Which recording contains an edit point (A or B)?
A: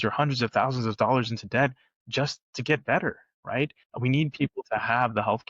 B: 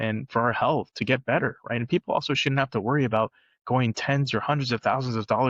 A